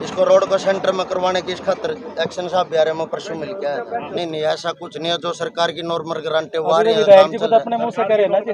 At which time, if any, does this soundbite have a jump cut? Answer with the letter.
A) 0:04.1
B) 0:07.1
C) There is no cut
A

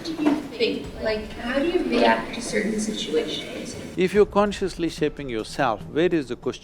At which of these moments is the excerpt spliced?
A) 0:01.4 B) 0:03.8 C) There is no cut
B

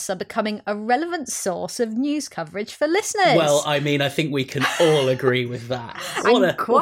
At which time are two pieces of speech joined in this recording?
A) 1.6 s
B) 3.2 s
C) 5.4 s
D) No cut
D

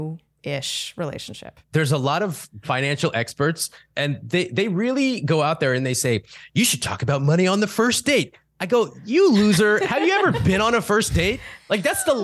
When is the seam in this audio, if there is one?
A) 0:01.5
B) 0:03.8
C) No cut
A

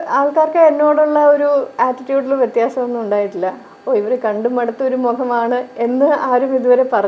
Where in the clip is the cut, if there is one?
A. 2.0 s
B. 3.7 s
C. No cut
B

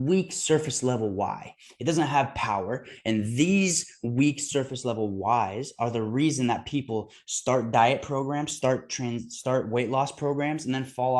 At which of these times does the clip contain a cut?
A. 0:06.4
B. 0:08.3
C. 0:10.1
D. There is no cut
D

